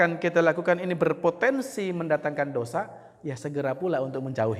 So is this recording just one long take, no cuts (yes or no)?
yes